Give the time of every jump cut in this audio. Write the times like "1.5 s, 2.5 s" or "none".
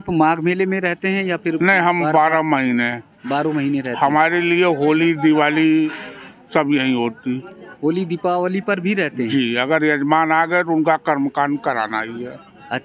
none